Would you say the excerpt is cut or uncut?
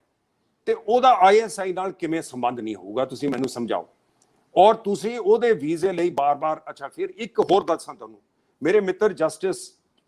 uncut